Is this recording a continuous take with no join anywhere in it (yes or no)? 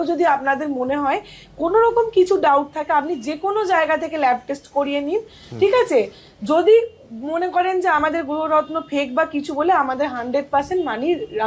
yes